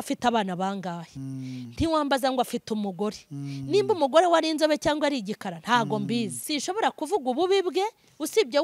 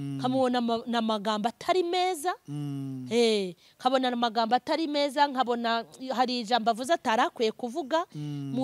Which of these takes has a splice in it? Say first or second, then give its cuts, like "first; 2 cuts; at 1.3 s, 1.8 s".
first; 1 cut; at 6.4 s